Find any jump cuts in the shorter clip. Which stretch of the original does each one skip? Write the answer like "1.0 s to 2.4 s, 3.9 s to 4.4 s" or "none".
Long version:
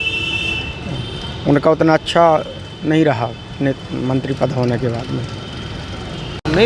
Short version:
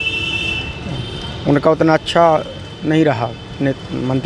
none